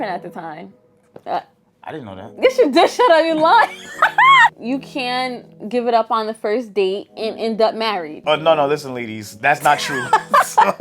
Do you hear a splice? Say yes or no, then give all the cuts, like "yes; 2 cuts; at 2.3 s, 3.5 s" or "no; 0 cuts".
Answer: yes; 2 cuts; at 4.5 s, 8.2 s